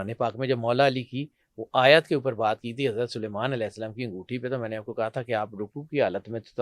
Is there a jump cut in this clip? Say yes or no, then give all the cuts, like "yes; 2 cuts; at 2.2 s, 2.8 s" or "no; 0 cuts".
no; 0 cuts